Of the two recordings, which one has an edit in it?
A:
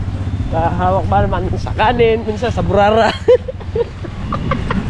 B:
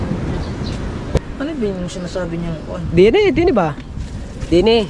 B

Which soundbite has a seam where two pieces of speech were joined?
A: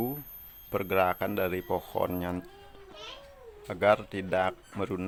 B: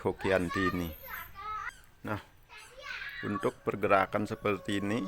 B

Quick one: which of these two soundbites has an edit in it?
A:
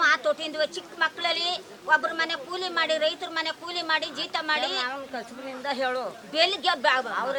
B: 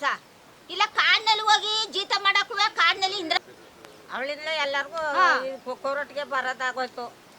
B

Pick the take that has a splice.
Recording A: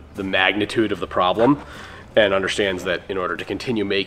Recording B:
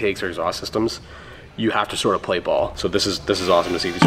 B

